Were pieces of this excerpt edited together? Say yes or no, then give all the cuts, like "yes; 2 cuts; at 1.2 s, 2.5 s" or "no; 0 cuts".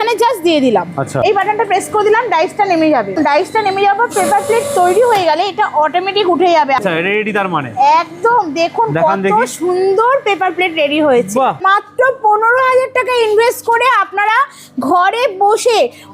yes; 4 cuts; at 1.2 s, 3.2 s, 6.8 s, 11.6 s